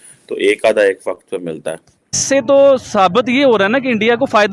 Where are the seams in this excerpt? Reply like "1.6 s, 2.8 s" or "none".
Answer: 2.2 s

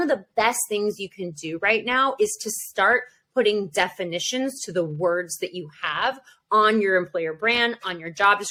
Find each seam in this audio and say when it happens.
none

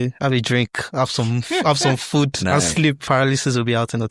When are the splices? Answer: 3.0 s

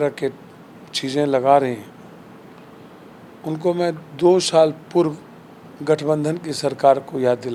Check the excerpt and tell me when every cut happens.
none

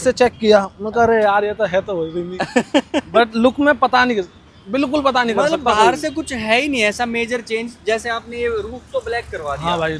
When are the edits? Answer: none

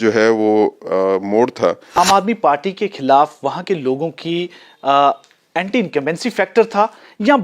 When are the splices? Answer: 2.0 s

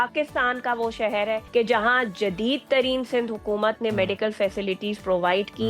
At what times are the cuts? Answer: 1.4 s

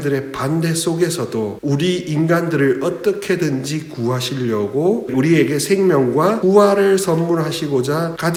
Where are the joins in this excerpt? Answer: none

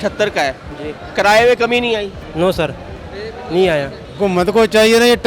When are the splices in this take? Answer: 2.2 s, 4.0 s

